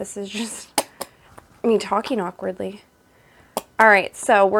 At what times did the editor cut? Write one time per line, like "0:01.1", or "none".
none